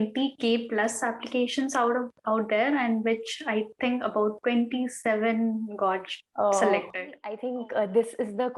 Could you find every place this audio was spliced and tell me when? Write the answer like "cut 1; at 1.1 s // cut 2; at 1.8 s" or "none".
cut 1; at 7.3 s